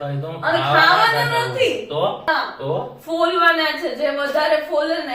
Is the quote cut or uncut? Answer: cut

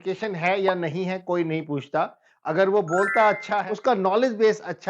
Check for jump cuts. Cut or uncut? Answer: cut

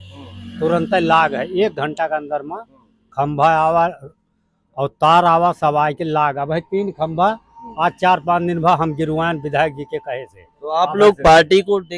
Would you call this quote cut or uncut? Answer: uncut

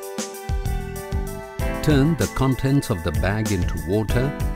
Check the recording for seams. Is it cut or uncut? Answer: uncut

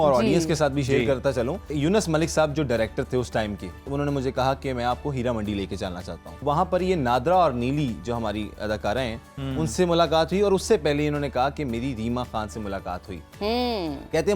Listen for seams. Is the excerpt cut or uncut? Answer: cut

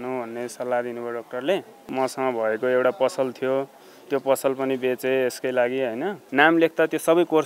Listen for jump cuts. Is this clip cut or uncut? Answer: cut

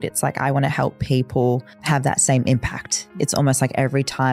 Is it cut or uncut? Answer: cut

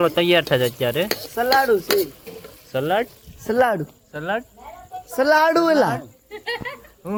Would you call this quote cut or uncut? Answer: uncut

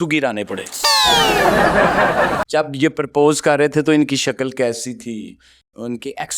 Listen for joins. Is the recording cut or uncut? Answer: cut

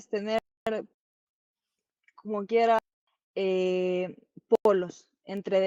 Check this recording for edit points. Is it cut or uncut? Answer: uncut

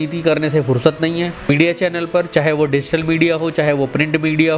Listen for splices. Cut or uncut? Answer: cut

